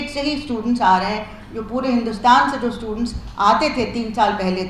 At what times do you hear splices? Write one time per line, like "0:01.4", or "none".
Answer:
none